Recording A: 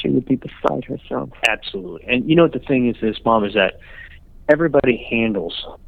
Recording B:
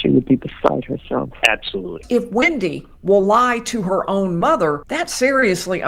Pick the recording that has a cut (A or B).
B